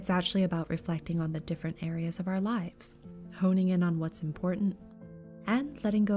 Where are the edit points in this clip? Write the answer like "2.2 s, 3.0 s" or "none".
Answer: 1.9 s, 4.8 s